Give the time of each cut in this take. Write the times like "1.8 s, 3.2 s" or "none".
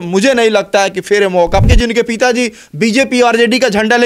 1.7 s